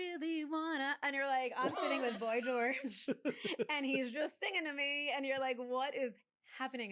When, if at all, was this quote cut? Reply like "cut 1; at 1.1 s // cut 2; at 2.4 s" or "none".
none